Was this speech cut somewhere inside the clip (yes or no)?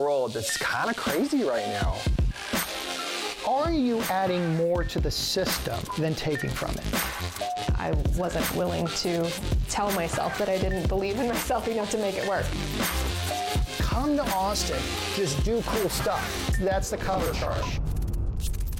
no